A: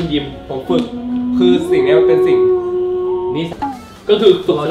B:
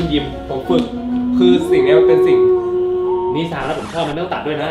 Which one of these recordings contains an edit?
A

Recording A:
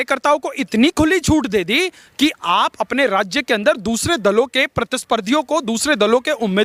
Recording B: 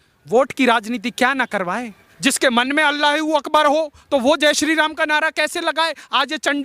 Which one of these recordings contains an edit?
B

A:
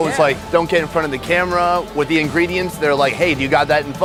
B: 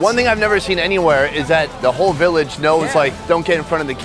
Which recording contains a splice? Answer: B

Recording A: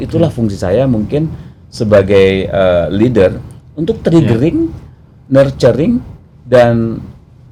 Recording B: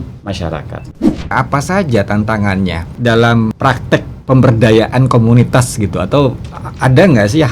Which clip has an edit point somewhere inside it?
B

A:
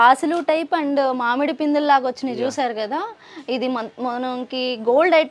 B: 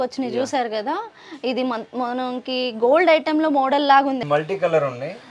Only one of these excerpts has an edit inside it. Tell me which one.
B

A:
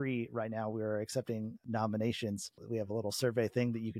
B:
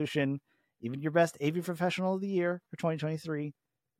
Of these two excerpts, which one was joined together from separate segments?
A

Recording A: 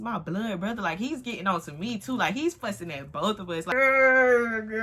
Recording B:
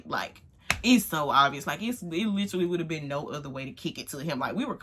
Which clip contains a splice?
A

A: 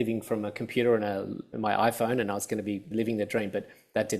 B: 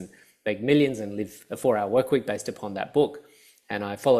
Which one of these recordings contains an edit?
A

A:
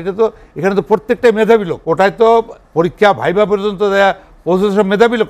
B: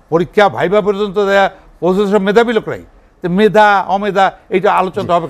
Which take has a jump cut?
A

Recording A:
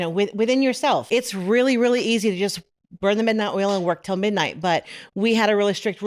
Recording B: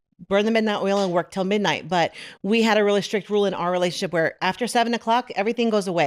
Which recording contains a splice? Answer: A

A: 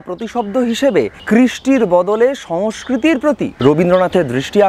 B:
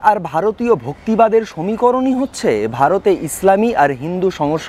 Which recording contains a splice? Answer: A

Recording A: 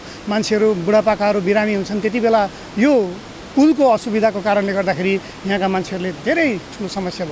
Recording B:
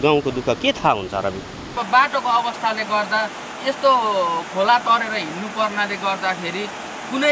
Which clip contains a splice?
B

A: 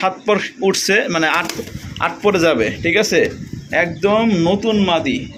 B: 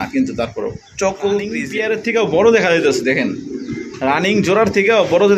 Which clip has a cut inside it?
B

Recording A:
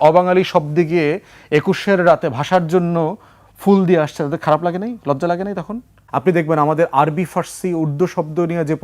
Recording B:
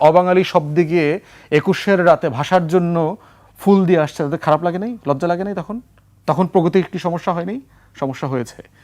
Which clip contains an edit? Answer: A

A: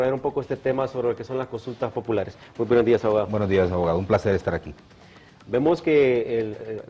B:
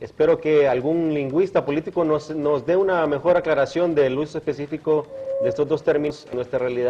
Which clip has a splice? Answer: B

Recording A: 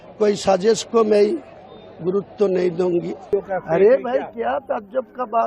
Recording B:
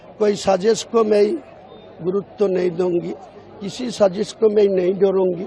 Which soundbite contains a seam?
A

